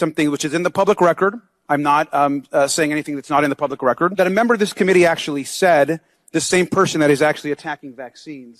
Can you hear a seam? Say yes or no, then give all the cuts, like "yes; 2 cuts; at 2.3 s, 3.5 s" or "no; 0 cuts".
yes; 1 cut; at 4.1 s